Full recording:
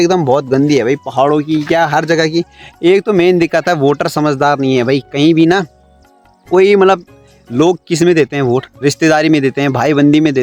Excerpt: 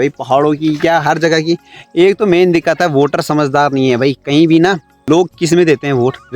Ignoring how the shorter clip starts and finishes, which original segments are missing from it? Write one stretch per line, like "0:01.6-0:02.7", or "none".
0:05.8-0:07.4